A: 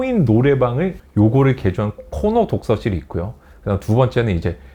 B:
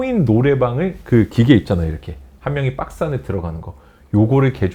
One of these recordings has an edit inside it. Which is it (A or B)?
A